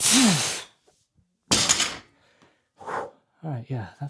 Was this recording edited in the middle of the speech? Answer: no; 0 cuts

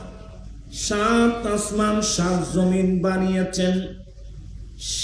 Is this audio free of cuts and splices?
yes; 0 cuts

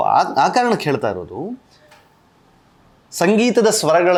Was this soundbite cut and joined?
no; 0 cuts

